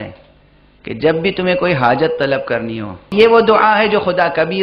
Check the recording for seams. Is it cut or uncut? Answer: cut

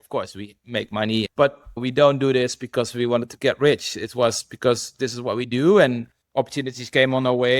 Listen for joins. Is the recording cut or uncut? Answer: cut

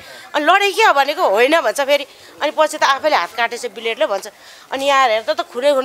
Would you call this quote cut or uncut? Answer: uncut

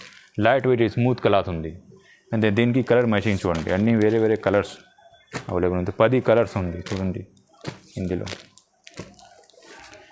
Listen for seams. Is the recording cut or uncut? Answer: uncut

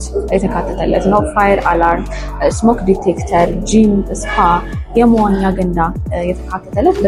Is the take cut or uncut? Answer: uncut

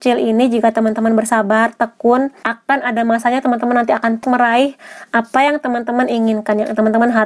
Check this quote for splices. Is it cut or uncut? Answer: cut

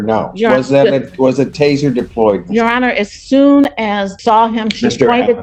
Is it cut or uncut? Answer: cut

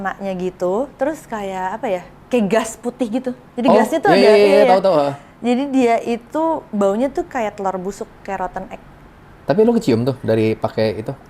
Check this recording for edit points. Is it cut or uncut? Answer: uncut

